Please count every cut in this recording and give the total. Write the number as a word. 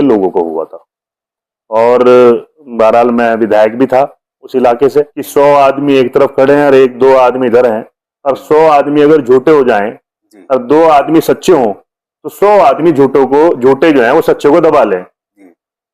one